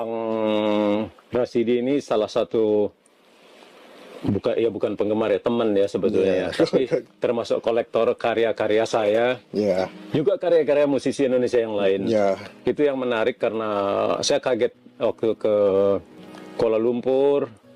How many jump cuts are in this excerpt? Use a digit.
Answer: 1